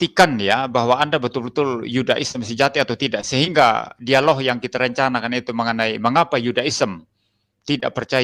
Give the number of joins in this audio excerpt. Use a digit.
0